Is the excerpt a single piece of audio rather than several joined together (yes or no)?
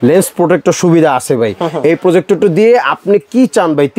yes